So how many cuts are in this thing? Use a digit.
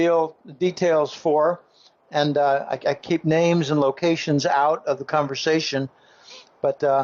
1